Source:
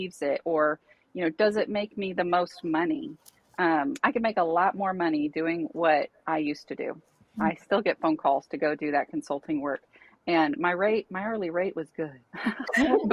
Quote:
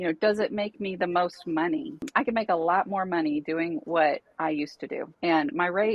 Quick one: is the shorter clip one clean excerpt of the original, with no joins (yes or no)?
no